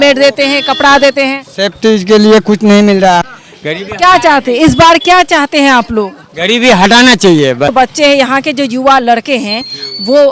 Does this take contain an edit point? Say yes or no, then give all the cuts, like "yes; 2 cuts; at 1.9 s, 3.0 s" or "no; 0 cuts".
yes; 2 cuts; at 3.2 s, 7.7 s